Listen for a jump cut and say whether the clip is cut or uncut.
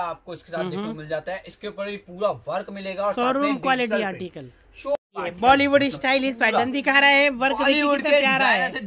cut